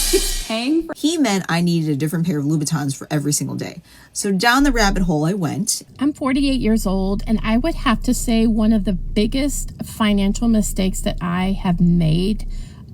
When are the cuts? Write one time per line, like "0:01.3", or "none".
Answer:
0:00.9
0:05.8